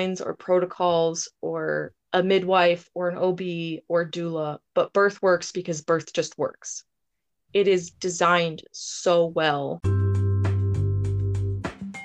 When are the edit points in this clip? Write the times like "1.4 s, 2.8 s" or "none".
2.0 s, 9.8 s

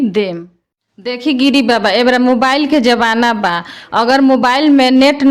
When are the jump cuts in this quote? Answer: 1.0 s

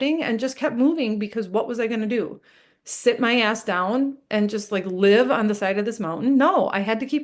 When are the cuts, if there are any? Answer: none

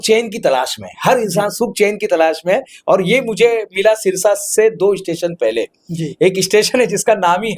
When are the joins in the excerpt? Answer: none

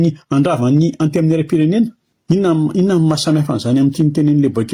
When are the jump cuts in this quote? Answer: 2.1 s

